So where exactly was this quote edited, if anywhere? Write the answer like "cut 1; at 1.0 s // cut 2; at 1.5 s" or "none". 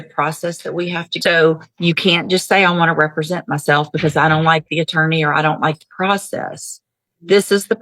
cut 1; at 1.1 s